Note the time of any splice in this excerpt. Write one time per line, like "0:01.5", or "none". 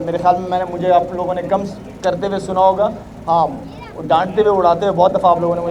none